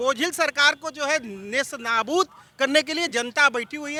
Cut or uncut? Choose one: uncut